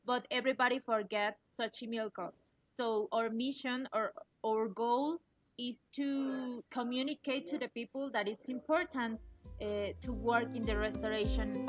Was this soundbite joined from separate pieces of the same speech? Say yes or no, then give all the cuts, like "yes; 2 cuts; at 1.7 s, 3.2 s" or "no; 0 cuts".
no; 0 cuts